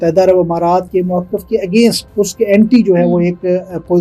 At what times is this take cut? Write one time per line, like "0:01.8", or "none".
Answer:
0:00.9
0:02.0

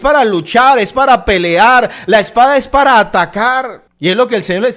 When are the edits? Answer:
none

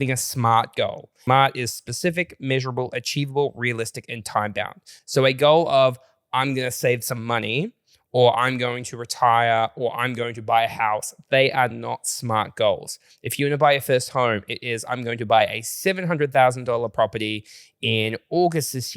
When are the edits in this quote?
0:01.1

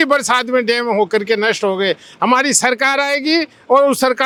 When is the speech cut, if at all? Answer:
none

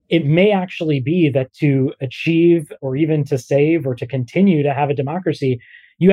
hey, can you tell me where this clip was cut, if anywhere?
none

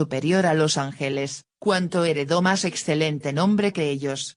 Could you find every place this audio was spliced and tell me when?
0:01.4

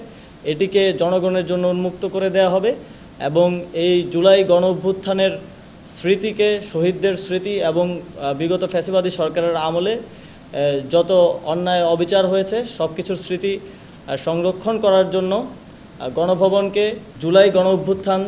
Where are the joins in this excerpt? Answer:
0:17.1

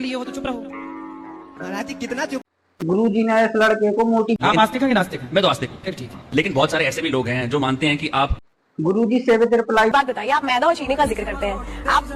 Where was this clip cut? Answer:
0:02.4
0:04.4
0:08.5
0:09.9

